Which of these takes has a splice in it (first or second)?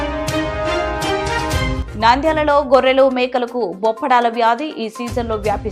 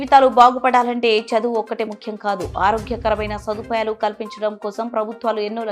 first